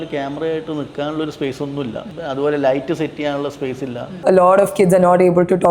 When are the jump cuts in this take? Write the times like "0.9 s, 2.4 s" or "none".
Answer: 2.1 s, 4.2 s